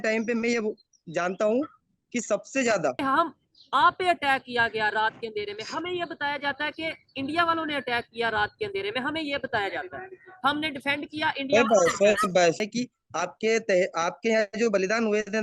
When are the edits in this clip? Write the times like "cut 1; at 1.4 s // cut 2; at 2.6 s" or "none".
cut 1; at 3.0 s // cut 2; at 12.6 s